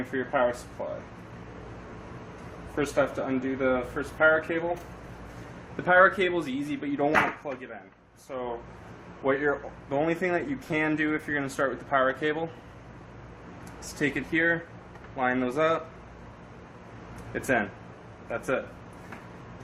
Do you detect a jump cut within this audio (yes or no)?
no